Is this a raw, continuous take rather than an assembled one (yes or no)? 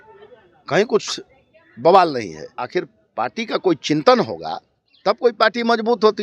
no